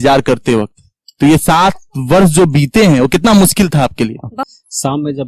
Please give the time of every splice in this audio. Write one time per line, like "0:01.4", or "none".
0:04.3